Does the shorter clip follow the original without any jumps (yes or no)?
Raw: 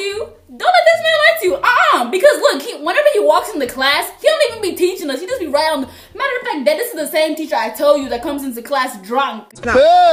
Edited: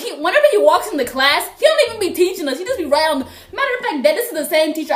yes